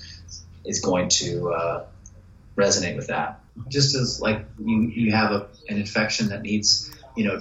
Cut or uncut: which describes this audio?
cut